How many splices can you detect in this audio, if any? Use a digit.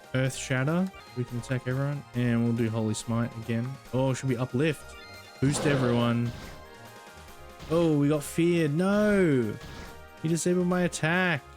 1